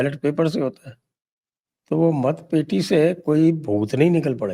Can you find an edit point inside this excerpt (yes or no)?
no